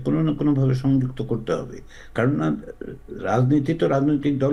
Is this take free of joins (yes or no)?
yes